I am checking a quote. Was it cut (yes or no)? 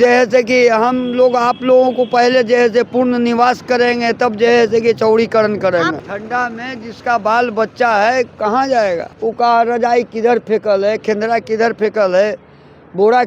yes